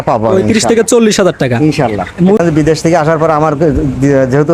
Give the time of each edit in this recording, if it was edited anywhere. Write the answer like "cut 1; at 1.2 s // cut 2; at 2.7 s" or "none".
cut 1; at 2.4 s